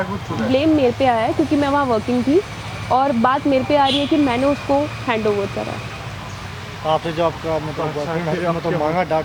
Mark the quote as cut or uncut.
uncut